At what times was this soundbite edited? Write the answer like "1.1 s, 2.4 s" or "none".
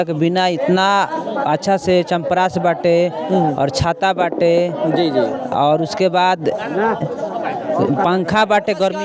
none